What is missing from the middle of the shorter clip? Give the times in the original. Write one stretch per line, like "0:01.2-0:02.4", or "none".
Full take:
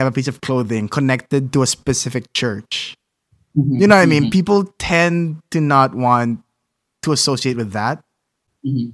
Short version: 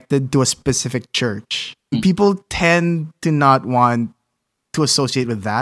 0:03.2-0:04.3